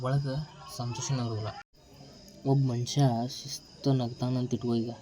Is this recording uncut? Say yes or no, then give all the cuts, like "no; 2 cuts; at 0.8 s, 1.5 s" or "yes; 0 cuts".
no; 1 cut; at 1.7 s